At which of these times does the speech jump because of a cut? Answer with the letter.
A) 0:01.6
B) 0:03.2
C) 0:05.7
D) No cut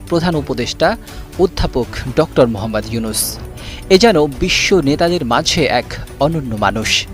D